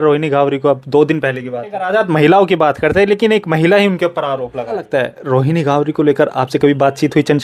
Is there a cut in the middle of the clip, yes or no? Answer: yes